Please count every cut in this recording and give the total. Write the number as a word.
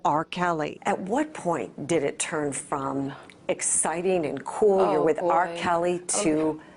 one